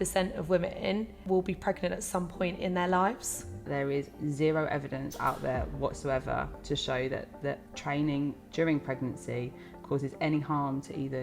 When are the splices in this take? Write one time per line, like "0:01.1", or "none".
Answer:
0:01.2
0:03.7
0:07.7